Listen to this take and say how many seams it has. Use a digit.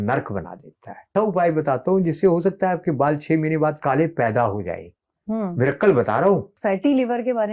2